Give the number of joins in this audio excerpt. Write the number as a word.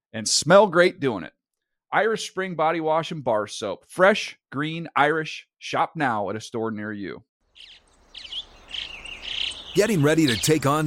one